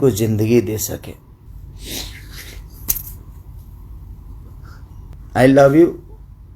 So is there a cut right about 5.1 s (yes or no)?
yes